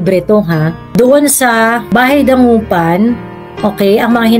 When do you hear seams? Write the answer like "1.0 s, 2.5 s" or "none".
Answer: 0.9 s, 1.8 s